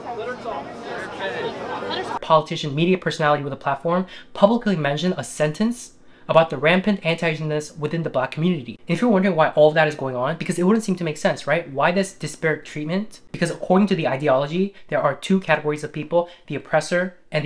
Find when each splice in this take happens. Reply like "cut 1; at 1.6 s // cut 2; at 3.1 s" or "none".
cut 1; at 2.2 s // cut 2; at 13.2 s